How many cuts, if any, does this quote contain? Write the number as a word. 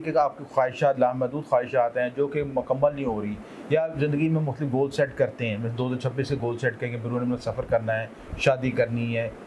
zero